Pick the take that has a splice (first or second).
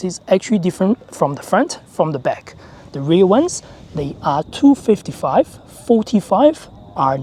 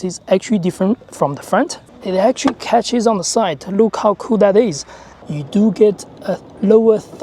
second